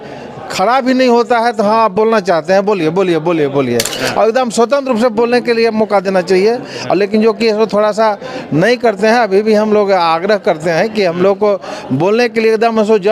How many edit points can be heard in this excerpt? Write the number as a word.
one